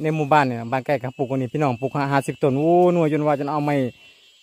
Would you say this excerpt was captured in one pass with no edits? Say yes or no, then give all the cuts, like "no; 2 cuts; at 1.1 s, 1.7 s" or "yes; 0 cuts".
yes; 0 cuts